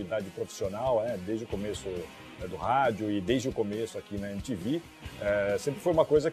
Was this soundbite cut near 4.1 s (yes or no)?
no